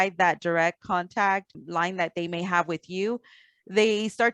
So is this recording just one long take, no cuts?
yes; 0 cuts

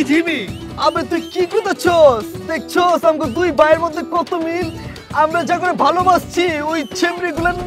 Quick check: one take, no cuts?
yes; 0 cuts

